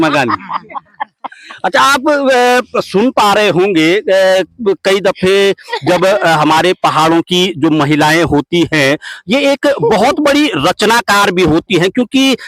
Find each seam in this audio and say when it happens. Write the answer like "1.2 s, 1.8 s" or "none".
none

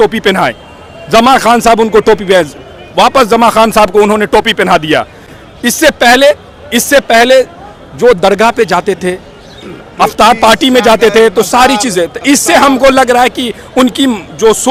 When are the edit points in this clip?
none

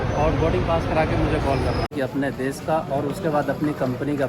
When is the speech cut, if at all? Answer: 1.9 s

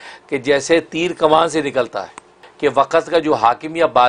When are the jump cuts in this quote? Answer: 2.4 s

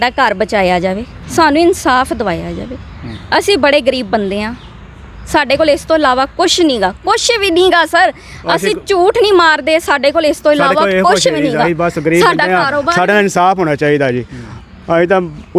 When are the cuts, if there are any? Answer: none

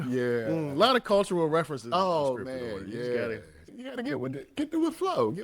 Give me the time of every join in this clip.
3.8 s

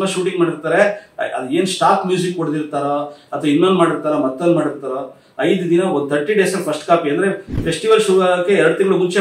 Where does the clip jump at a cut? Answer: none

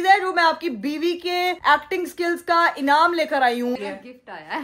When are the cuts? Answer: 3.8 s

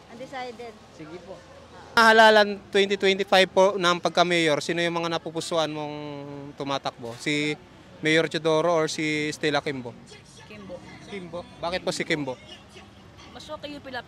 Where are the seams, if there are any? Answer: 2.0 s

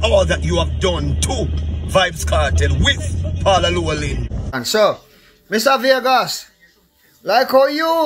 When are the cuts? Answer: 4.6 s

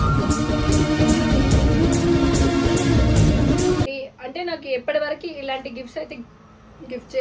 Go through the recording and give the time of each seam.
3.8 s

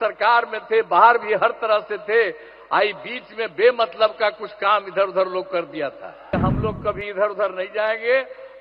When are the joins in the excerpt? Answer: 6.3 s

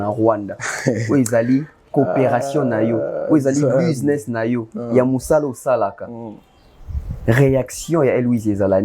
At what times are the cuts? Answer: none

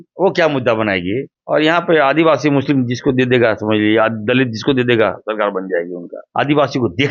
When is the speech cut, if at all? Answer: 1.3 s, 6.2 s

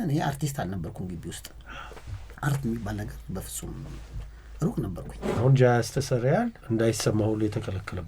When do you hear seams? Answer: 5.4 s, 6.6 s

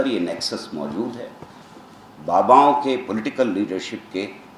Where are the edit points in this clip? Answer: none

